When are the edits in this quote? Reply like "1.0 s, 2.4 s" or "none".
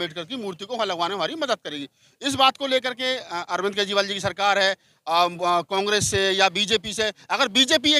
none